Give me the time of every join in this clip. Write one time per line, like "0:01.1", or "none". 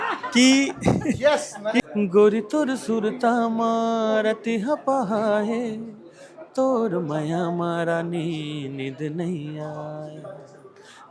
0:01.8

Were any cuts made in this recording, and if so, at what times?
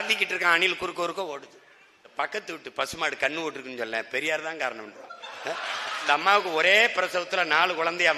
0:02.0
0:06.0

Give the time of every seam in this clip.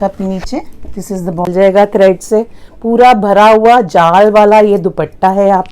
0:01.5

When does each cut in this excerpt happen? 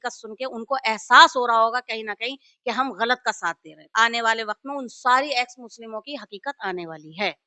0:03.8

